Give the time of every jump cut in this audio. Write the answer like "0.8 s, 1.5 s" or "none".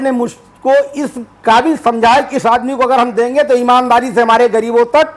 none